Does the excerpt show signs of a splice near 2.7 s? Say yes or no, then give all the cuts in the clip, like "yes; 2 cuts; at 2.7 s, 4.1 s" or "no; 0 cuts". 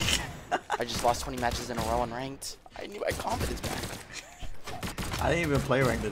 no; 1 cut; at 5.0 s